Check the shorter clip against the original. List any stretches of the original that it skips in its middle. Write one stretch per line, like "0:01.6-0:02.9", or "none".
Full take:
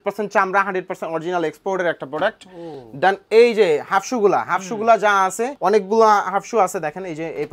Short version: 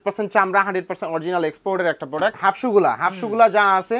0:02.4-0:03.9

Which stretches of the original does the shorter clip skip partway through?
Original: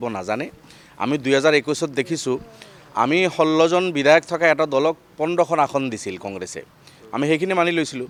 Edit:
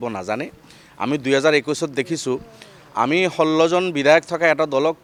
none

